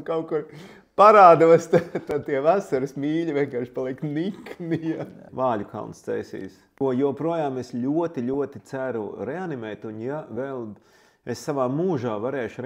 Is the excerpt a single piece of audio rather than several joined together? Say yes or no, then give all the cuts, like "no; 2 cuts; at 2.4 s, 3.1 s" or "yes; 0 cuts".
no; 2 cuts; at 5.3 s, 6.6 s